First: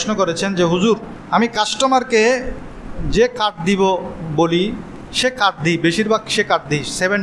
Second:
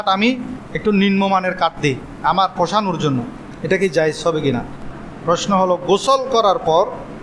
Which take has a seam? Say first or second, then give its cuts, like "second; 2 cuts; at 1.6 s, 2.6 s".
second; 2 cuts; at 2.1 s, 4.7 s